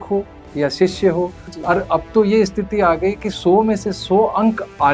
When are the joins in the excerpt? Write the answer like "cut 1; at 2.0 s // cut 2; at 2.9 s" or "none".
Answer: cut 1; at 1.5 s